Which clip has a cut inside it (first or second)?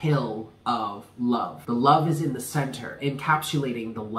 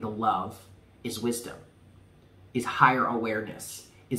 first